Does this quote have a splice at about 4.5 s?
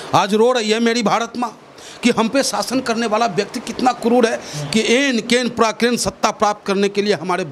no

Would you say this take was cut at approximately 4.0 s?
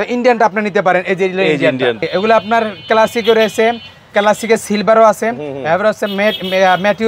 no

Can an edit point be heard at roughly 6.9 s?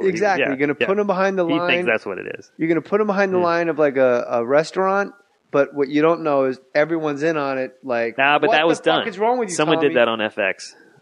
yes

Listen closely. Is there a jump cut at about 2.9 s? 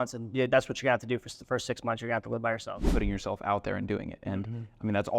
yes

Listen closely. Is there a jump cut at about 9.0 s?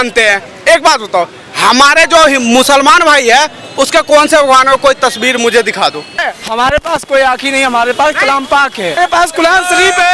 yes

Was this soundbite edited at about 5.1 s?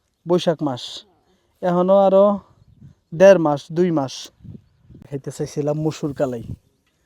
yes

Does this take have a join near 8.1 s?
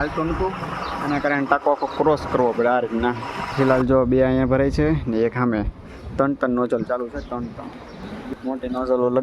yes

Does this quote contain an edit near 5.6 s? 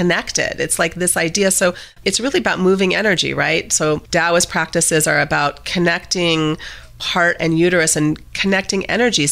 no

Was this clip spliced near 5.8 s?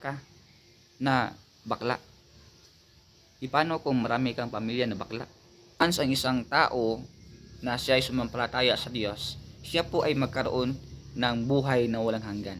yes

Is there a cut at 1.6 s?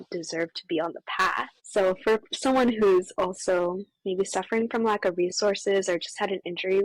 yes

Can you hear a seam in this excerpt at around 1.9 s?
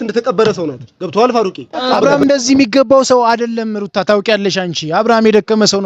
yes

